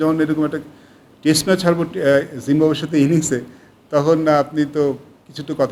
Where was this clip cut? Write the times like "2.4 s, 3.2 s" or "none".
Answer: none